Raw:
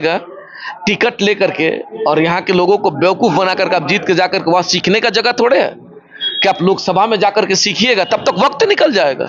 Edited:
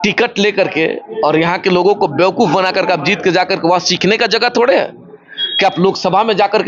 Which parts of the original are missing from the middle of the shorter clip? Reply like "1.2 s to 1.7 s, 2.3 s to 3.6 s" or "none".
none